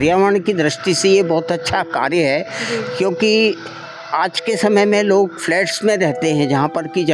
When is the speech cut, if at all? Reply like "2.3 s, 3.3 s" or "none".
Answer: none